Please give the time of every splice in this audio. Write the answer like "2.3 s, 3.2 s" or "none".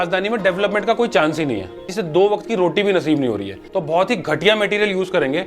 1.9 s, 3.7 s